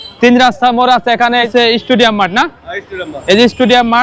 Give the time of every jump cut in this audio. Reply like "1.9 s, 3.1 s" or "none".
1.5 s